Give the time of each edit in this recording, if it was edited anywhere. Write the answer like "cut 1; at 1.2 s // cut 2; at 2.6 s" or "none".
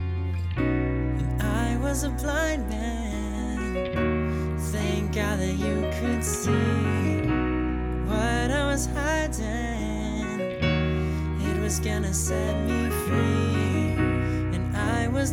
none